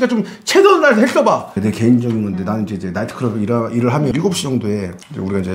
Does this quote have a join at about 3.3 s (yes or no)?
no